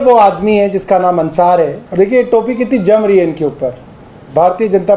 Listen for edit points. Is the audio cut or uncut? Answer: cut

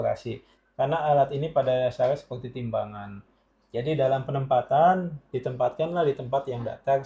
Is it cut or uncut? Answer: uncut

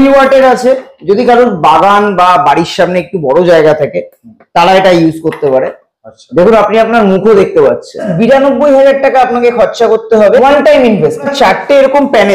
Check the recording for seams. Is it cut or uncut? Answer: cut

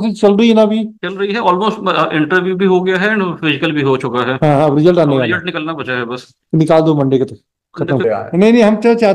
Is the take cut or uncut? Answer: cut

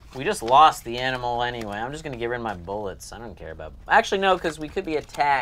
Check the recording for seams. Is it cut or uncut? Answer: uncut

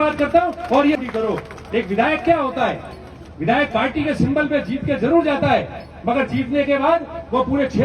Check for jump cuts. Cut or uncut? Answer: cut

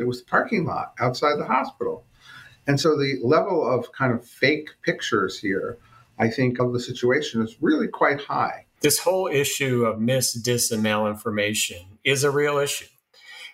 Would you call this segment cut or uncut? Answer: cut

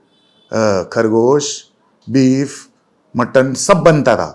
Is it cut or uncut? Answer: uncut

